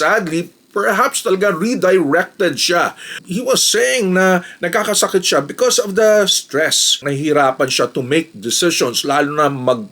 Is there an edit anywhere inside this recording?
yes; 2 cuts; at 3.3 s, 7.0 s

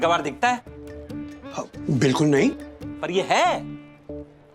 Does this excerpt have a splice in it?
no; 0 cuts

